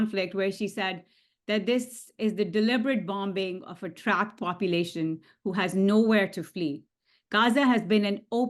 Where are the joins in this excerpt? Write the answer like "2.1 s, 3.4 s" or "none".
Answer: none